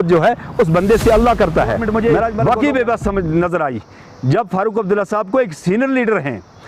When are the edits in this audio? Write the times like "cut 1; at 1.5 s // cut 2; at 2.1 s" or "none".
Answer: cut 1; at 1.8 s